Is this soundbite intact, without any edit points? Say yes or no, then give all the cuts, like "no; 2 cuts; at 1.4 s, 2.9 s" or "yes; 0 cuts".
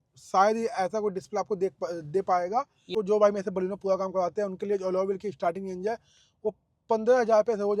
no; 1 cut; at 2.9 s